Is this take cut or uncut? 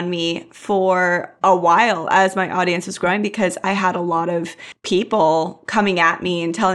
uncut